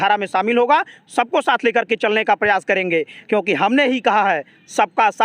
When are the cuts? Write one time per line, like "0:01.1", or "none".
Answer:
none